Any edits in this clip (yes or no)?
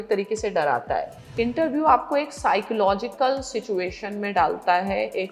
yes